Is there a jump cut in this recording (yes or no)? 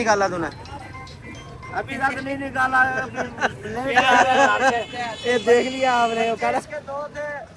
no